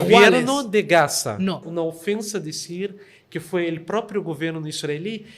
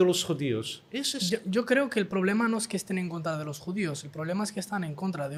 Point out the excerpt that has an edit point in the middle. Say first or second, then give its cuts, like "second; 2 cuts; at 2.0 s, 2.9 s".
first; 1 cut; at 1.7 s